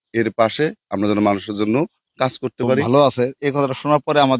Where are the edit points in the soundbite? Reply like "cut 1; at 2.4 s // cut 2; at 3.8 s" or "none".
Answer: cut 1; at 2.8 s